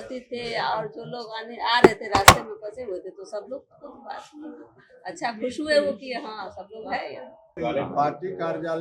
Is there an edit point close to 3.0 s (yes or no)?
no